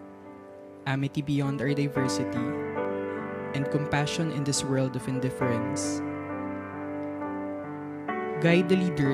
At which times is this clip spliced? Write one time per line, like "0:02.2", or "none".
none